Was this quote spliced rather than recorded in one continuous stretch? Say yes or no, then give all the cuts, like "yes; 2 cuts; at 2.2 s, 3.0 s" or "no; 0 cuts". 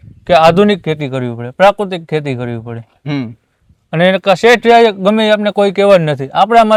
no; 0 cuts